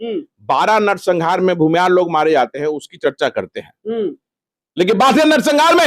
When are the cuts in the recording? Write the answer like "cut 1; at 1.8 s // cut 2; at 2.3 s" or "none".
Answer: none